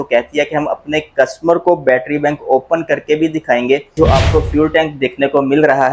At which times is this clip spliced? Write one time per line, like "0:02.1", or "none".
0:04.0